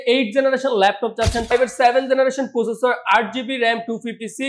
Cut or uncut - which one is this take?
cut